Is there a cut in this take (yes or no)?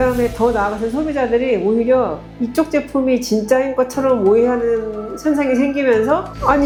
no